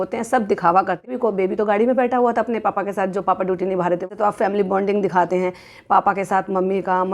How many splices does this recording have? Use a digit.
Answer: 2